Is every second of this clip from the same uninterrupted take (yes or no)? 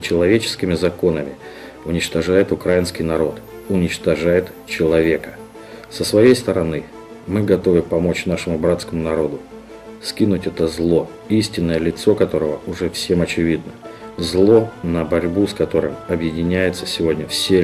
no